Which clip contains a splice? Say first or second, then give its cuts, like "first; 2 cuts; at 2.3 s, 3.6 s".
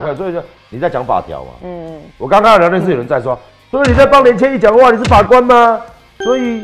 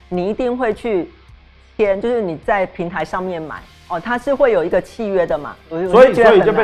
second; 1 cut; at 5.6 s